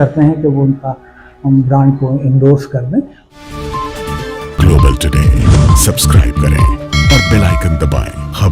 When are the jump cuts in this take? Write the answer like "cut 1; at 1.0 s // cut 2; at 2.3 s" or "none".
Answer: cut 1; at 3.2 s